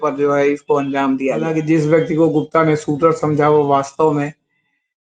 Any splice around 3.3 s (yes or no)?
no